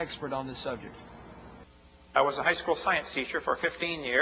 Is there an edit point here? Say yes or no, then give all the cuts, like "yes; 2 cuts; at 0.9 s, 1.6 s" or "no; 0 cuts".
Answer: no; 0 cuts